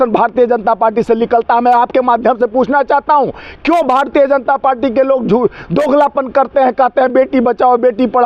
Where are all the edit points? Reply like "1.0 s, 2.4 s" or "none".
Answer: none